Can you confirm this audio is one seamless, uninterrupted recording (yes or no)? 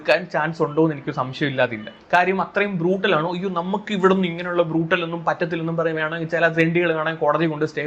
yes